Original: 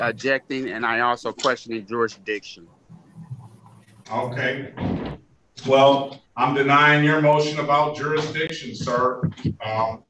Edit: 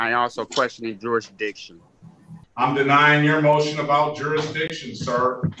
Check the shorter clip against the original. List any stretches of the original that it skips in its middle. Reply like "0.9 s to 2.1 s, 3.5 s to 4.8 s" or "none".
3.3 s to 6.2 s